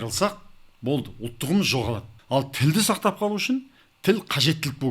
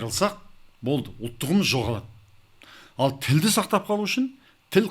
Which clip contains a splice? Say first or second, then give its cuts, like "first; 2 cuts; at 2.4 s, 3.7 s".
first; 1 cut; at 2.1 s